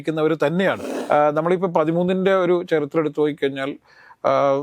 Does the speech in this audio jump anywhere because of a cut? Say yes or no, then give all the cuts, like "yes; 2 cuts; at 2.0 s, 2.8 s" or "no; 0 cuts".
yes; 1 cut; at 0.9 s